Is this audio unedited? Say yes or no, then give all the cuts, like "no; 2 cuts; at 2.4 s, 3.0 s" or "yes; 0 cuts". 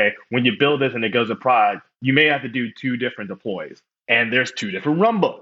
no; 1 cut; at 3.8 s